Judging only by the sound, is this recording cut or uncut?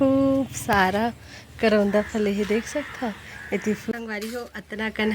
cut